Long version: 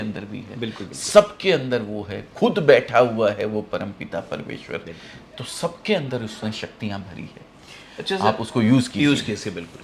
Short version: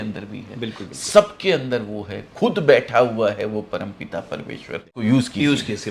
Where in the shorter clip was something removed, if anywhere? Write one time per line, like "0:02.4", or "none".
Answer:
0:05.0